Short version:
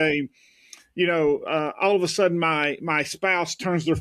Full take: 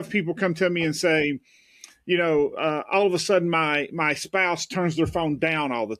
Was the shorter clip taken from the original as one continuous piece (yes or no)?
yes